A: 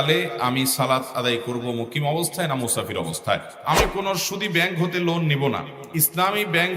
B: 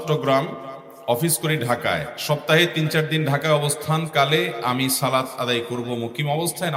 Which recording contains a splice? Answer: A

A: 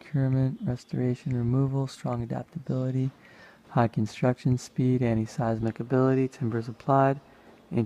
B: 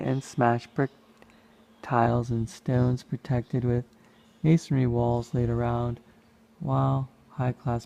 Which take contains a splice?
A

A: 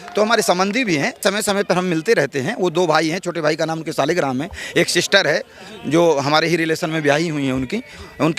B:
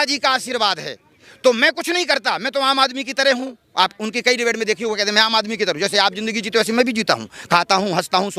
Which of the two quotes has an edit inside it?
A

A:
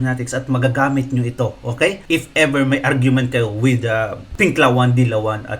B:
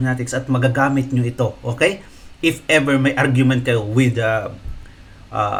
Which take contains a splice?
A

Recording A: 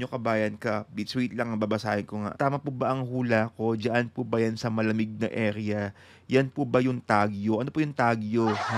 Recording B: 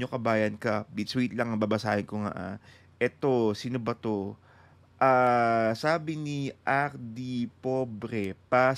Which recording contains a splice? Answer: A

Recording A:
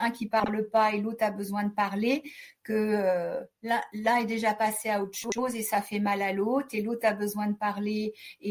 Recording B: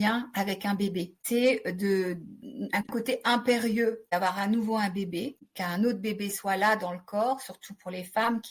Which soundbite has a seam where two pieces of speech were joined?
B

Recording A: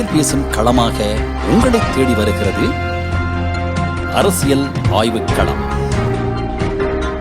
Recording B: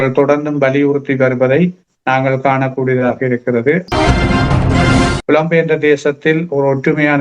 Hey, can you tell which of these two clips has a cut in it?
B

